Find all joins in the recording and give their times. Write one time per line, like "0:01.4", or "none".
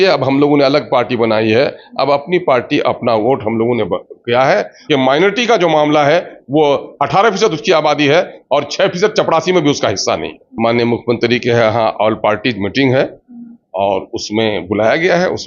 0:04.8
0:10.4